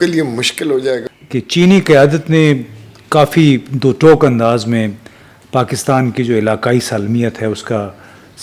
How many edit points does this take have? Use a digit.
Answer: 1